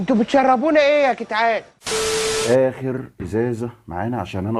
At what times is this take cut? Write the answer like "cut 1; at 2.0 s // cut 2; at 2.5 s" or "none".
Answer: cut 1; at 2.4 s